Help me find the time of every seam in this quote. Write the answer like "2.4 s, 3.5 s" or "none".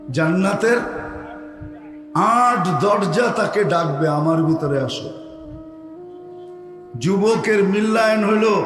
5.4 s, 6.7 s